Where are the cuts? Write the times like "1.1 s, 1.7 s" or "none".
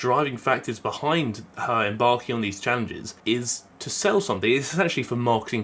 none

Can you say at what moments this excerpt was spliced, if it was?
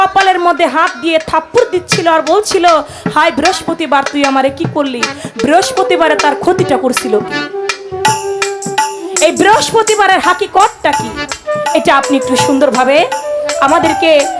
none

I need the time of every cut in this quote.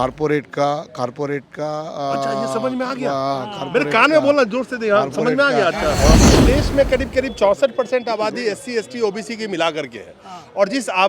6.1 s

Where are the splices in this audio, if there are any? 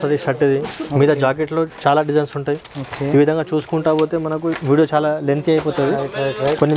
none

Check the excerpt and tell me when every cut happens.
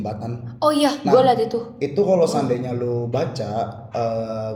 none

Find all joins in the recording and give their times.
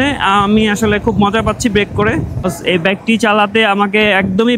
2.3 s

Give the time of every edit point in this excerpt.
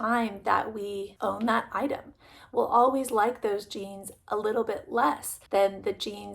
1.1 s, 5.3 s

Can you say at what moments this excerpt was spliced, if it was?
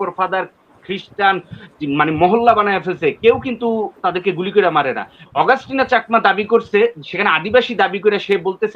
5.1 s

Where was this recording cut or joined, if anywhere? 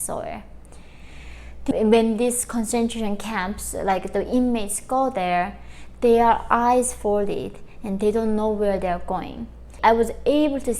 1.7 s, 9.7 s

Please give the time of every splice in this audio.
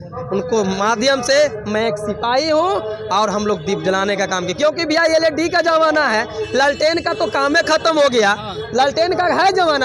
none

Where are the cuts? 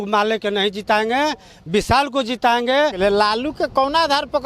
3.0 s

